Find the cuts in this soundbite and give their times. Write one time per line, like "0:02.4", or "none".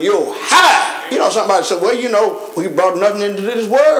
0:01.0